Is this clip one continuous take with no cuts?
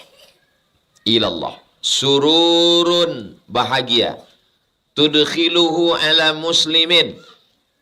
yes; 0 cuts

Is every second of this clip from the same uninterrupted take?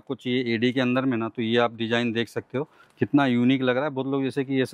yes; 0 cuts

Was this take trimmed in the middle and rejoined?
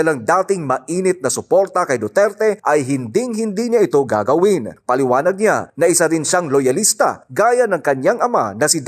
no; 0 cuts

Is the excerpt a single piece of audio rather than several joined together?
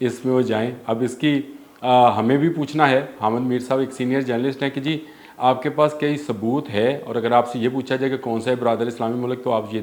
yes; 0 cuts

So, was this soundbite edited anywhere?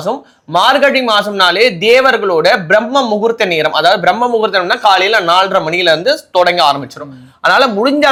no; 0 cuts

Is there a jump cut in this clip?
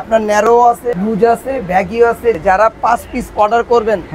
yes; 2 cuts; at 0.9 s, 2.4 s

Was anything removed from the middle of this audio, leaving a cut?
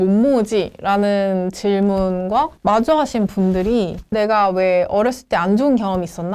yes; 2 cuts; at 2.5 s, 4.0 s

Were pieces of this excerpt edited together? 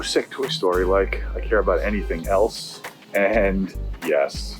no; 0 cuts

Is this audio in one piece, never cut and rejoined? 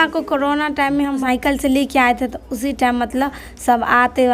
no; 1 cut; at 1.2 s

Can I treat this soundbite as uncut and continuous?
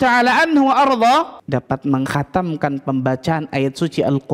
no; 1 cut; at 1.4 s

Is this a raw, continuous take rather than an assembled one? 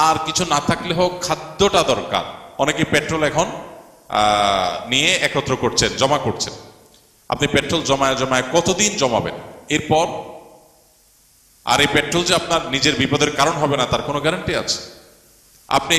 no; 1 cut; at 2.4 s

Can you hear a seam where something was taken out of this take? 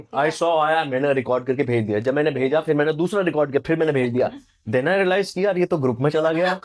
no; 0 cuts

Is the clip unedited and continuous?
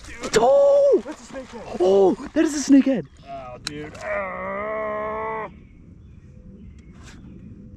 no; 1 cut; at 3.2 s

